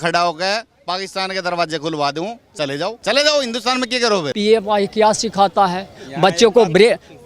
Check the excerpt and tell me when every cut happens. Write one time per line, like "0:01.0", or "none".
0:03.0
0:04.3